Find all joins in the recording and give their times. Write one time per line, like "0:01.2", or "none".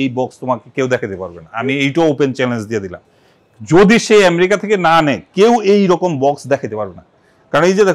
none

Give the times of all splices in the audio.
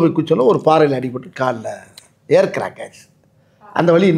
none

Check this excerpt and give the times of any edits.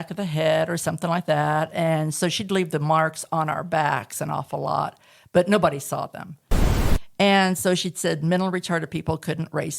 0:06.7

